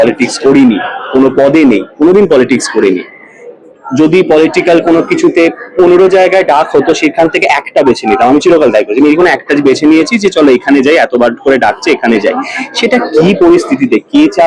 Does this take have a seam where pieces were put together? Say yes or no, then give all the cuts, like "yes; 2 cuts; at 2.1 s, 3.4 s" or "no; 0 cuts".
no; 0 cuts